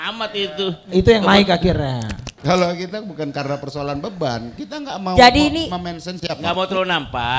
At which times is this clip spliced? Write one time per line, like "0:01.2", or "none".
0:02.3

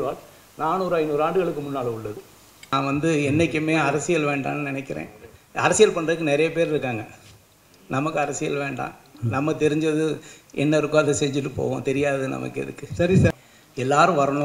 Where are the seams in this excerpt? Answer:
0:02.7
0:13.3

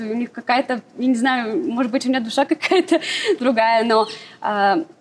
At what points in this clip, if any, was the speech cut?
none

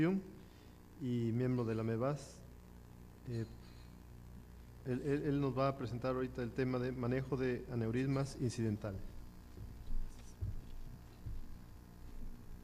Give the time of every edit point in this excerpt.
0:02.8

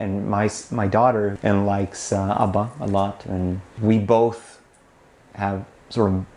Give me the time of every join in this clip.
0:01.4

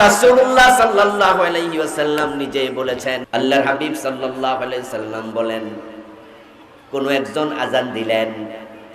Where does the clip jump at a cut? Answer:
0:03.2

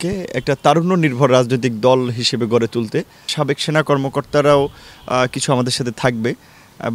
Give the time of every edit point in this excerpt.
0:03.3

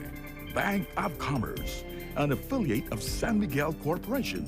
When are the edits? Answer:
none

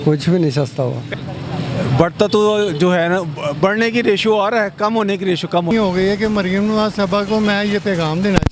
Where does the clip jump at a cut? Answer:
0:01.0
0:05.7

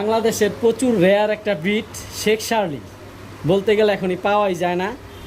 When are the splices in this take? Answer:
none

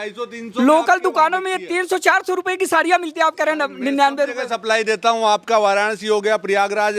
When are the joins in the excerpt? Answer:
none

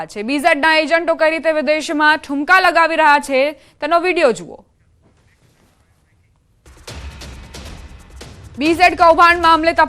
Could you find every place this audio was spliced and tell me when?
0:03.3

